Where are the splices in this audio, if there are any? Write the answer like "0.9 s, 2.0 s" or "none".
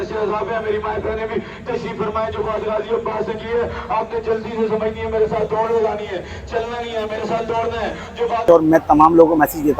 8.5 s